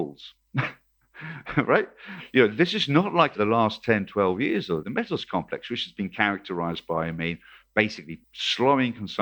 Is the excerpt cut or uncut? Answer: cut